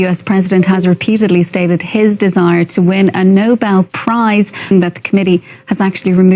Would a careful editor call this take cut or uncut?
cut